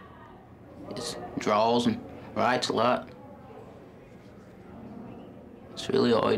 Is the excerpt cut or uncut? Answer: uncut